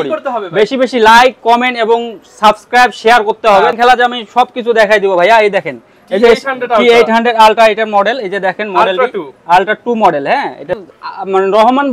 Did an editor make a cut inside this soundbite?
yes; 2 cuts; at 3.7 s, 10.7 s

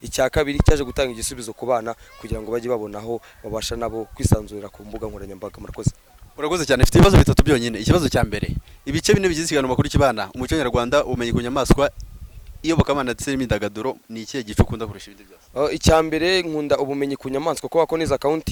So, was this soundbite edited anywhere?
no; 0 cuts

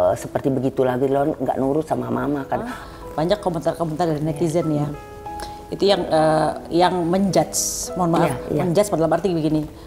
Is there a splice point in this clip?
yes; 1 cut; at 2.8 s

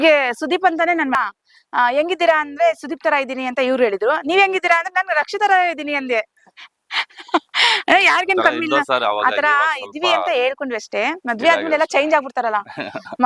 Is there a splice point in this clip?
yes; 1 cut; at 1.2 s

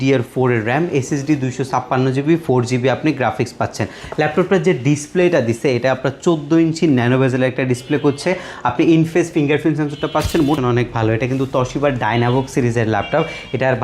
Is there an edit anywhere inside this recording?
yes; 1 cut; at 10.6 s

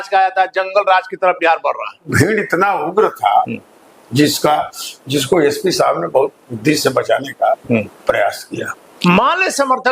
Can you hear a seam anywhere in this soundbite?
yes; 2 cuts; at 2.1 s, 8.8 s

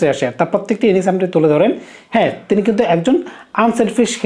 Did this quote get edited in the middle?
no; 0 cuts

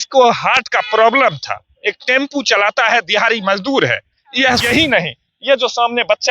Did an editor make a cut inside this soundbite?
yes; 1 cut; at 4.6 s

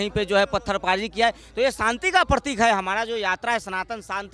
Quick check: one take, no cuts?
yes; 0 cuts

